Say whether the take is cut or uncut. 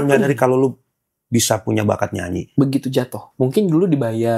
cut